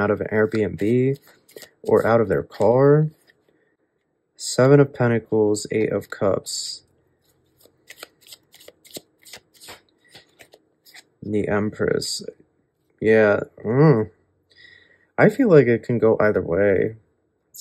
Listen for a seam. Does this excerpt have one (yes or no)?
no